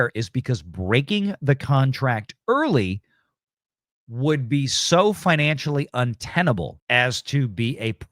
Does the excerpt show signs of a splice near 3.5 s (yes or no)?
no